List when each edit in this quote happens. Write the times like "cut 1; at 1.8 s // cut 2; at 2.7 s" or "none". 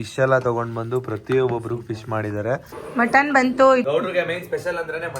cut 1; at 2.8 s // cut 2; at 3.8 s